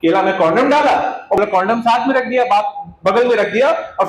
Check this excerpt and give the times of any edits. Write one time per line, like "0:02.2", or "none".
0:01.4